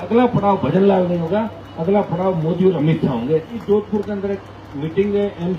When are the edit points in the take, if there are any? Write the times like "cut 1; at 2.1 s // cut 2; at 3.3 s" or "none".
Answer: cut 1; at 3.6 s